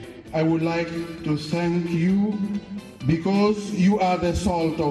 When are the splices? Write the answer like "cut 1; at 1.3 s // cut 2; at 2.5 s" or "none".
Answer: none

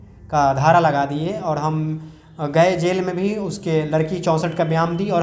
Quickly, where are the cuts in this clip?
none

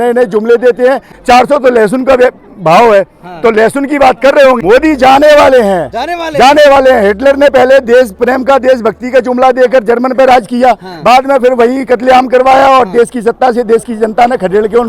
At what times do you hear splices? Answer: cut 1; at 1.1 s // cut 2; at 4.6 s

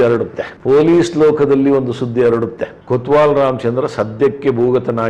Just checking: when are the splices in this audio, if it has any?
none

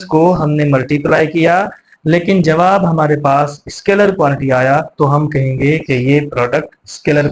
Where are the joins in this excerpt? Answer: none

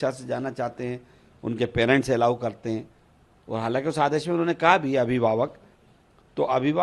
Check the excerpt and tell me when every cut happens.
none

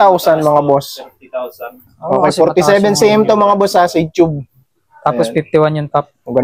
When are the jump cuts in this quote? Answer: none

